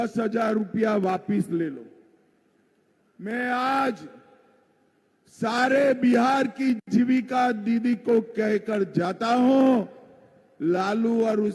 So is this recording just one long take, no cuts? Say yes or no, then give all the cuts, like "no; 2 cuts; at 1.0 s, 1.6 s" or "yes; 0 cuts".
yes; 0 cuts